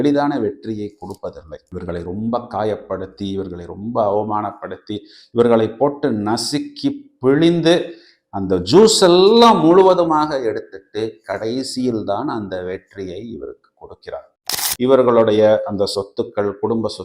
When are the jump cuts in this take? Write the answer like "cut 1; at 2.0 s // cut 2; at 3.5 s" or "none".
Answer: cut 1; at 14.3 s